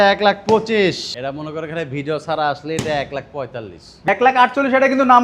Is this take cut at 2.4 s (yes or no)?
no